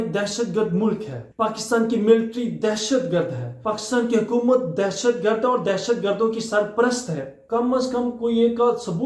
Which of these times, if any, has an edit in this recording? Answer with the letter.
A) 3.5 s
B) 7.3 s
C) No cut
B